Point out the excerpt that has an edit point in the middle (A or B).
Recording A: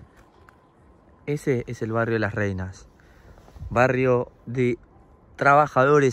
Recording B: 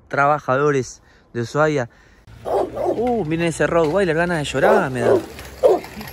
B